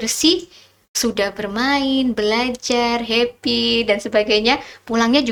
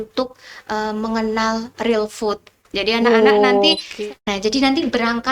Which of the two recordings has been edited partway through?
second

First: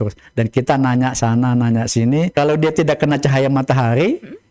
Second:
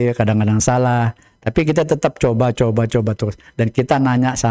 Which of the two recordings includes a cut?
first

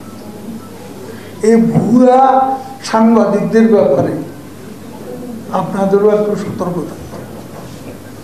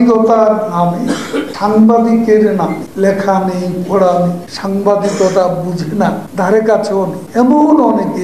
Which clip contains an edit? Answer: second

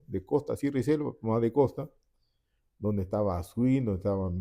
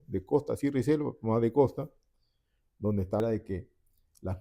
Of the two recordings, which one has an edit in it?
second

